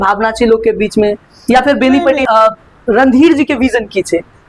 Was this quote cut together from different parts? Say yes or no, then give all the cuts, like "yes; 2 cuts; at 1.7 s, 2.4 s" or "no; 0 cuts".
yes; 1 cut; at 2.3 s